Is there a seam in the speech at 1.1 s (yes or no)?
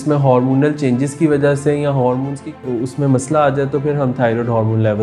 no